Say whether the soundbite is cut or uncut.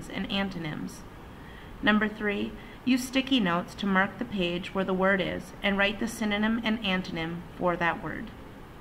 cut